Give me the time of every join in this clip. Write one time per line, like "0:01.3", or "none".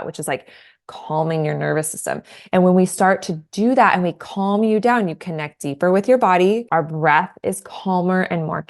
0:02.3
0:06.6